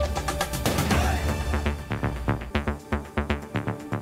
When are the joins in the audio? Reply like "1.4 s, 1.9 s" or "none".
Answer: 2.7 s